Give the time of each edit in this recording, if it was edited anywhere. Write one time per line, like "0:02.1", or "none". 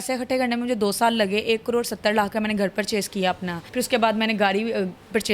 0:03.6

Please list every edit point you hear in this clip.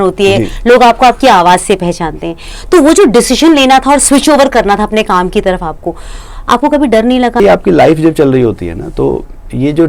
0:07.4

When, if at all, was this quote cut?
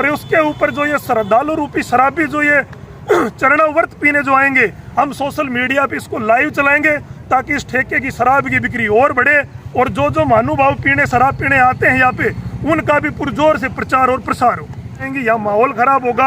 0:15.1

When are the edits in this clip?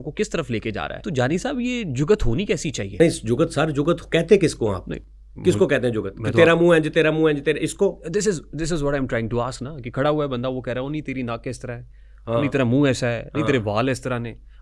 0:01.0
0:02.9

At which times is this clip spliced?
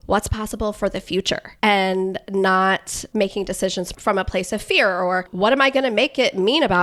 0:01.5
0:03.0
0:03.9

